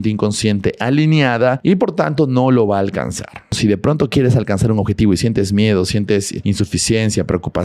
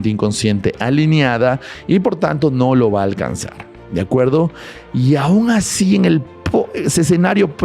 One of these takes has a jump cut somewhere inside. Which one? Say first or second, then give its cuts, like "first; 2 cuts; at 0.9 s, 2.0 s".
first; 3 cuts; at 1.6 s, 3.6 s, 6.3 s